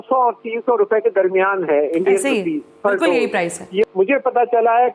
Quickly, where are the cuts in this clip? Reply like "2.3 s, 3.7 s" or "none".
3.8 s